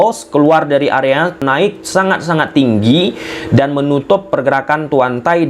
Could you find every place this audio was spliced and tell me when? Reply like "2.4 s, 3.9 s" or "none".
1.4 s